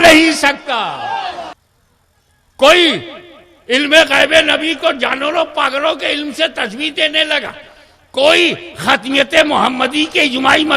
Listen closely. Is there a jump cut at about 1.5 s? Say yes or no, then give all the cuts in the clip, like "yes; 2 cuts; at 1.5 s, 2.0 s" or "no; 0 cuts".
yes; 1 cut; at 1.5 s